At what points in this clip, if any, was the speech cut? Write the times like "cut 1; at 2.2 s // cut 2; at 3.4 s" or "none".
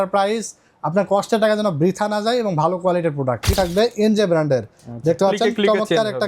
cut 1; at 3.5 s